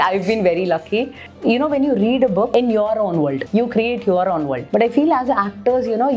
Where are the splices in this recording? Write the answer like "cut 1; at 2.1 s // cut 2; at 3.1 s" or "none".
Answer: cut 1; at 1.2 s // cut 2; at 2.5 s // cut 3; at 3.4 s // cut 4; at 4.6 s